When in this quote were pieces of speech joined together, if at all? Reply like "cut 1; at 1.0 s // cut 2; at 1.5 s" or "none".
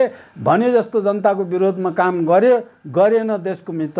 none